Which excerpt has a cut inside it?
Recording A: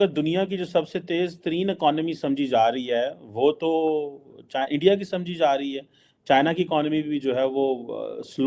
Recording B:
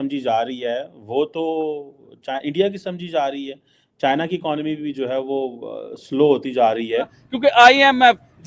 B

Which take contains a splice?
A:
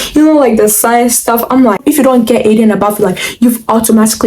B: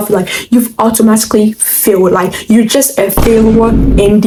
A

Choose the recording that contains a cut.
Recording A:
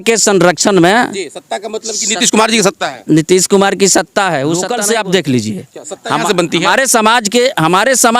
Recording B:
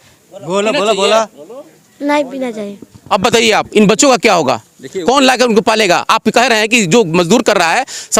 A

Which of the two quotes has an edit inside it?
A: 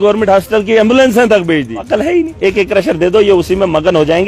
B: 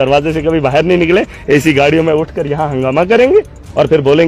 A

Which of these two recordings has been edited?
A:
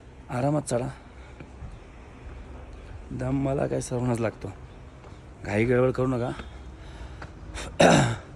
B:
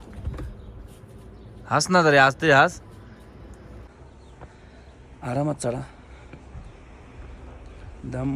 B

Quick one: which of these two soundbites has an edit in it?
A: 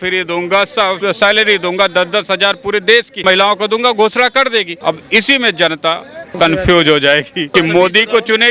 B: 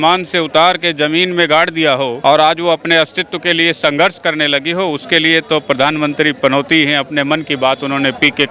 A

